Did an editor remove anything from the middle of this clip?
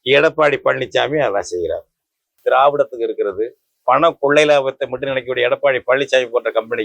yes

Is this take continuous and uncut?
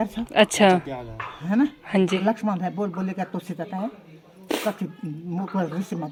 yes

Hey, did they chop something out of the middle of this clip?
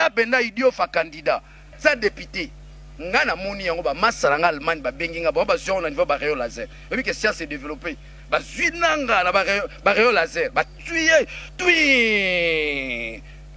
yes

